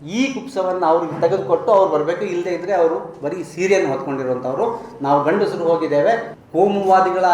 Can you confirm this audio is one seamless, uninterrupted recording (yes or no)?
no